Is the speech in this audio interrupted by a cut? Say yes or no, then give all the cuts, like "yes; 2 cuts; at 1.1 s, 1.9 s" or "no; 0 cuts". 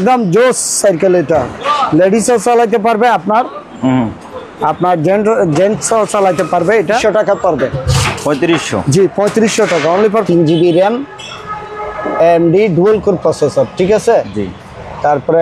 yes; 2 cuts; at 7.0 s, 10.2 s